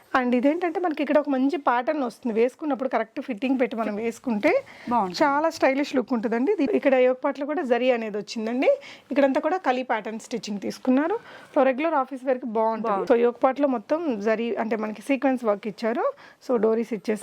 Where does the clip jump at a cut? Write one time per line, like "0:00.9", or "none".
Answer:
0:06.7
0:13.0